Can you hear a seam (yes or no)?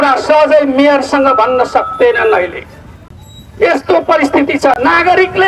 no